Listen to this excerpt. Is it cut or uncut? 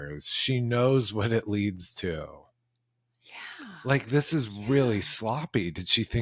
uncut